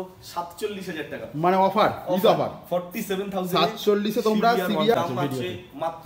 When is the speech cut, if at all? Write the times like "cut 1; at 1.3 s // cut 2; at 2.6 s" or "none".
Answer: cut 1; at 4.9 s